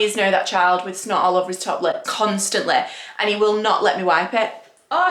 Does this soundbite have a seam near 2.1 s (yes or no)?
yes